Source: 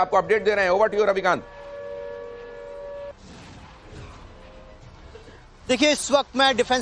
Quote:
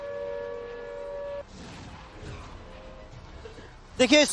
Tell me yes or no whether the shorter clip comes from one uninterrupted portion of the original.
yes